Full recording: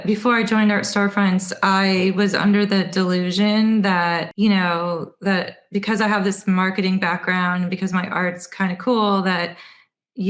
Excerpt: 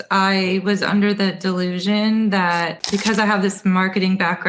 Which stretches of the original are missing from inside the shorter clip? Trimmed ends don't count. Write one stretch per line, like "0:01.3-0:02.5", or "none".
0:04.3-0:05.6